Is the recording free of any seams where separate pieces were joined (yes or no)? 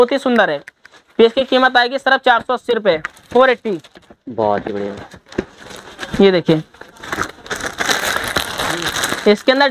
yes